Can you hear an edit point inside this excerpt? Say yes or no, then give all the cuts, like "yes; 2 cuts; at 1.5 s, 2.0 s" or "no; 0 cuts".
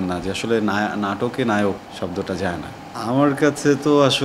yes; 2 cuts; at 1.9 s, 2.8 s